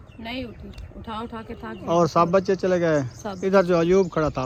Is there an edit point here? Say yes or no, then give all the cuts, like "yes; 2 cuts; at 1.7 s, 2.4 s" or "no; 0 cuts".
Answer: no; 0 cuts